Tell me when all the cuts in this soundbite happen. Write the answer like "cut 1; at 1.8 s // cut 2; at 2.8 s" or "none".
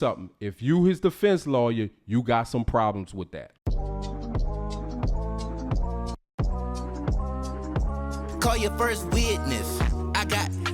cut 1; at 3.5 s